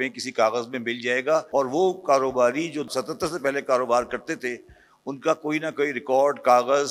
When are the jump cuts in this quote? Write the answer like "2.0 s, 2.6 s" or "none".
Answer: 1.5 s, 2.9 s